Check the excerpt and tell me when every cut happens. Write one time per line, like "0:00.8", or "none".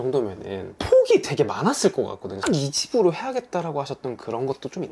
0:02.4